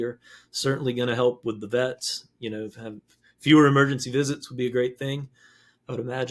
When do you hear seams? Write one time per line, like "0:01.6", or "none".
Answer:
none